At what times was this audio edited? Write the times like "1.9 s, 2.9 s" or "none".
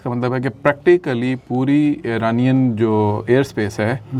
none